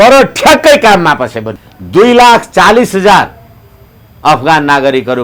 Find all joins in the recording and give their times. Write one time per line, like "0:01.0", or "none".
0:01.5